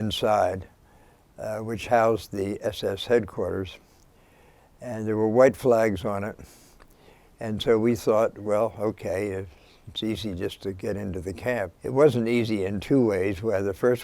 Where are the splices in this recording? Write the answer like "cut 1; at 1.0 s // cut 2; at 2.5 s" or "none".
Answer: cut 1; at 11.8 s